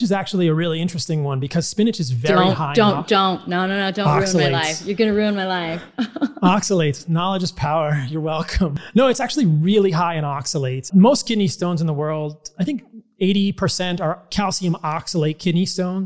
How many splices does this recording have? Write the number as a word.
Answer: two